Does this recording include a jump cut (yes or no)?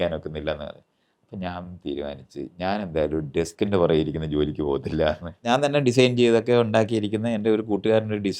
yes